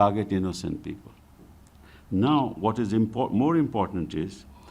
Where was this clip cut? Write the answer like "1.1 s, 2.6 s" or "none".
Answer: none